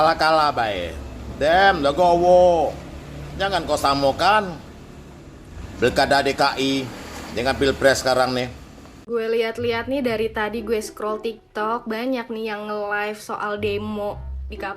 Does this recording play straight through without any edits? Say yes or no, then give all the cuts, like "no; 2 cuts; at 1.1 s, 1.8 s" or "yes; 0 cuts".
no; 1 cut; at 8.9 s